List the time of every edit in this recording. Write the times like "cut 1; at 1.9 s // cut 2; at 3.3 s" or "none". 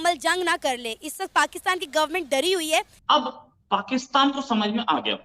cut 1; at 2.9 s